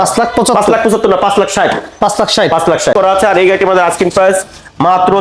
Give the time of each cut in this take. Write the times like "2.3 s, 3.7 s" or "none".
2.9 s